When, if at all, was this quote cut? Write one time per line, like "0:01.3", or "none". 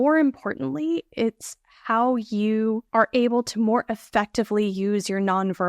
0:02.8